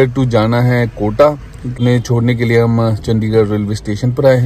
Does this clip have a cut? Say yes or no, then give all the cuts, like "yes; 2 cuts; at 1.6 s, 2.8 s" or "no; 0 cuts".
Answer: yes; 1 cut; at 1.8 s